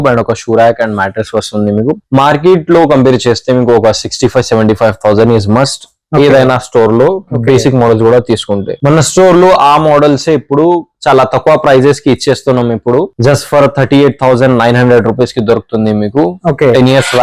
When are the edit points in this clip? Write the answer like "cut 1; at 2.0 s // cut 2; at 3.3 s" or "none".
cut 1; at 13.1 s